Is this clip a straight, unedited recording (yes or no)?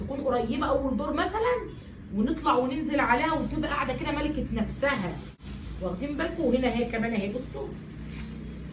yes